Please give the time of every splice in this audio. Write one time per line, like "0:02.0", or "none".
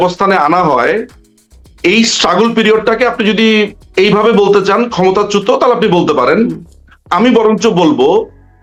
none